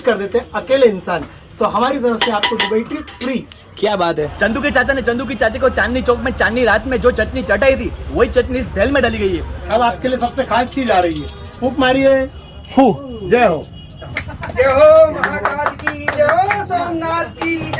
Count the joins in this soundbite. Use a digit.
3